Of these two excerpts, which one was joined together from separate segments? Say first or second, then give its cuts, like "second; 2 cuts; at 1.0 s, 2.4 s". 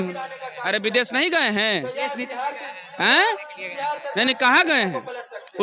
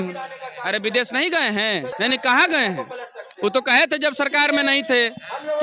second; 1 cut; at 1.9 s